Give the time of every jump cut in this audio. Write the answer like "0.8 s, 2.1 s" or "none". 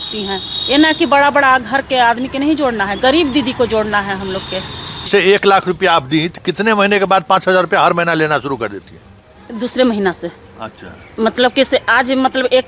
5.1 s